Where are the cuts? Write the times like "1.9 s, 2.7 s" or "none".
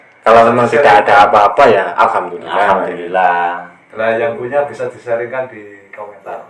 none